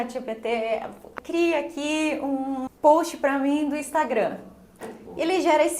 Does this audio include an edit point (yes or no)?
yes